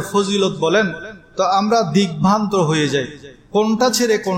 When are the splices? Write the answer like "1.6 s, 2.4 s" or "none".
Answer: none